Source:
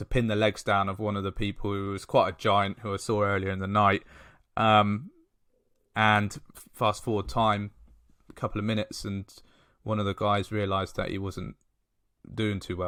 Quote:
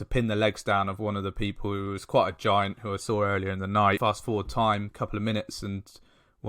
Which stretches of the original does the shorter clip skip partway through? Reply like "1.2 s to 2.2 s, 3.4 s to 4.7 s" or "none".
4.0 s to 6.8 s, 7.7 s to 8.3 s